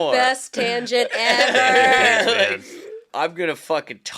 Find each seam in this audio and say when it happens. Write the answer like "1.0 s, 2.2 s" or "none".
3.1 s

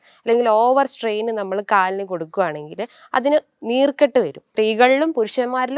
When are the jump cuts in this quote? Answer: 4.4 s

